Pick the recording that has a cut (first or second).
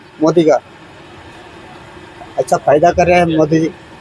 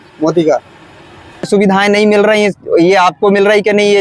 second